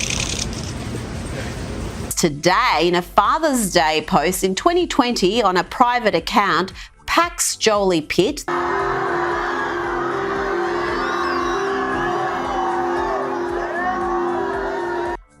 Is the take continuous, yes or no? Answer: yes